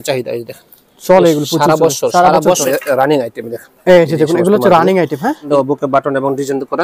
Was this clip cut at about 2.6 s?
yes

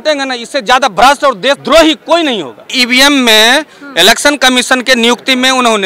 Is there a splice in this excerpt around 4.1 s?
no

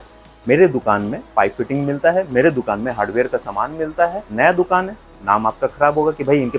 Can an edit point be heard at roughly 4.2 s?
yes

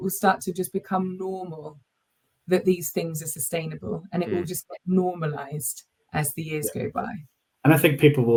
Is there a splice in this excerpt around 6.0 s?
no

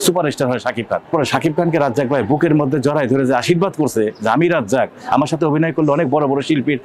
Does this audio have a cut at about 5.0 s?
no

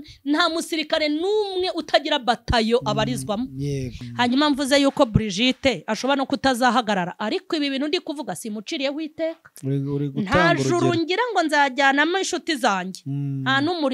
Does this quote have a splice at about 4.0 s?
yes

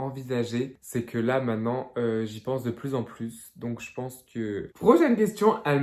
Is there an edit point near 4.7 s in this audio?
yes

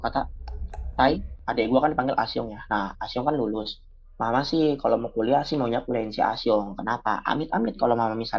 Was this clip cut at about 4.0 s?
no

